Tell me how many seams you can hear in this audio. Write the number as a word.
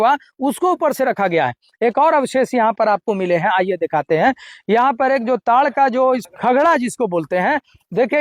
zero